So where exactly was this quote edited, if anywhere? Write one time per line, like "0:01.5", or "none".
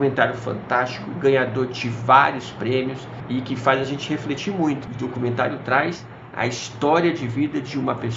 0:04.8